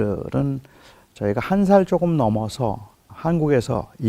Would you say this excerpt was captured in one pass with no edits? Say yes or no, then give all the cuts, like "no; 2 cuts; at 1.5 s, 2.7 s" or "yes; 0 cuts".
yes; 0 cuts